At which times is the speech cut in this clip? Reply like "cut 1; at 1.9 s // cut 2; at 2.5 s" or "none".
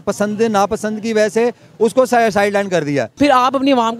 cut 1; at 3.1 s